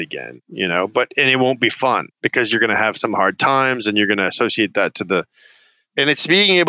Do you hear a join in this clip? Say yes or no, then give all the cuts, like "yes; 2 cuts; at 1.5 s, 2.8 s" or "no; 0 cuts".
no; 0 cuts